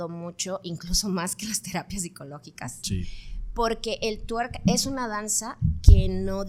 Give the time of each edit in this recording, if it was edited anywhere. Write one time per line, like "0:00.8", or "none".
none